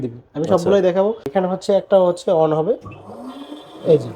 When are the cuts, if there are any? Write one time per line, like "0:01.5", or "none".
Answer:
0:01.2